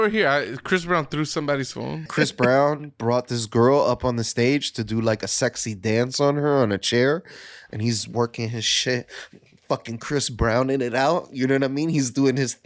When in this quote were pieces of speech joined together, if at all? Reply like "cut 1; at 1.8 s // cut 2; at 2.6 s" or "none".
cut 1; at 2.1 s